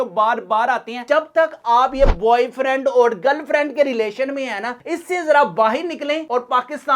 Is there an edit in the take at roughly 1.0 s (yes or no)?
yes